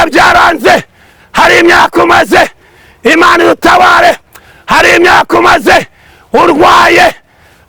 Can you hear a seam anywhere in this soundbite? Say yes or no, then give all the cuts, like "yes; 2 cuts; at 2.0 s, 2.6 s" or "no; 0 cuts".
no; 0 cuts